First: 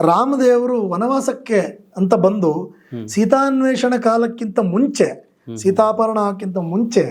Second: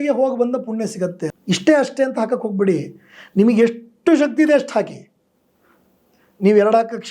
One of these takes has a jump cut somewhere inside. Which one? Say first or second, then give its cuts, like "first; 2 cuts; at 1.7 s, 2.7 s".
second; 1 cut; at 1.3 s